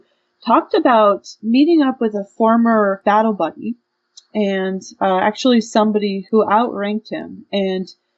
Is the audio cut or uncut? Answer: cut